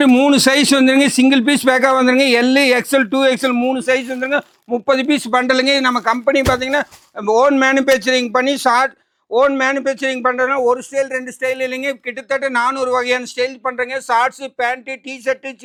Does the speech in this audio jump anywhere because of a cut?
no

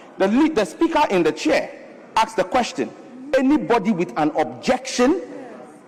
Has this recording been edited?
no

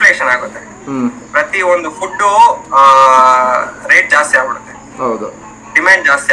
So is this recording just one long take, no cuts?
yes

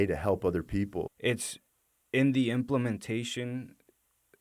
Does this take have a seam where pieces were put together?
yes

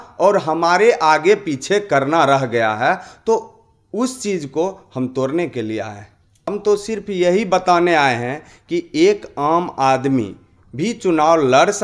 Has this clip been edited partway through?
yes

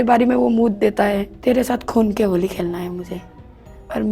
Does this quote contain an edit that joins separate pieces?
yes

